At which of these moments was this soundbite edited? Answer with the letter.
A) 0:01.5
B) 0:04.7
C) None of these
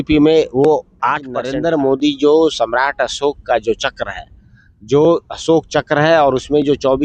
A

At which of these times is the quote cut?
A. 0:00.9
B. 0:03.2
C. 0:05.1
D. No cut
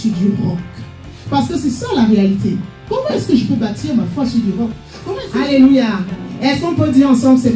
C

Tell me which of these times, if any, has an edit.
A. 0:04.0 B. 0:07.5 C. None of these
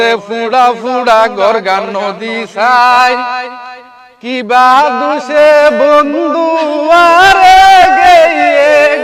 C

